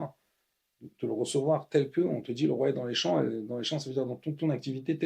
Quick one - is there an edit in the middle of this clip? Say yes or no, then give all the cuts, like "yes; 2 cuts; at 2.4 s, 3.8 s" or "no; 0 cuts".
no; 0 cuts